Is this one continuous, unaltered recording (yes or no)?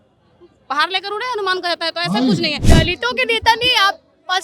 no